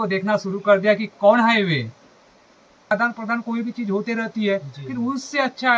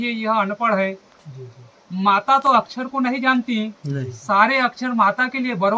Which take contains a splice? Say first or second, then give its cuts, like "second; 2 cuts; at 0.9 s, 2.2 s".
first; 1 cut; at 2.9 s